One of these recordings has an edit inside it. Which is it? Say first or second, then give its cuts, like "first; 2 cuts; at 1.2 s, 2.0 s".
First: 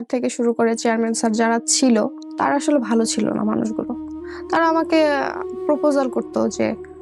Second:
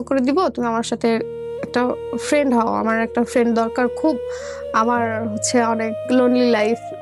first; 1 cut; at 2.2 s